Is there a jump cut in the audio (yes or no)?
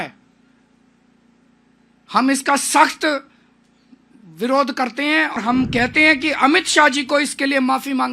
yes